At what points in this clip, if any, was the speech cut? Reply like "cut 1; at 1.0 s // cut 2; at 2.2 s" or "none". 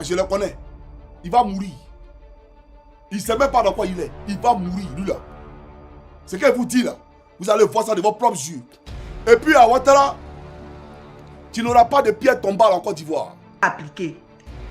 cut 1; at 13.6 s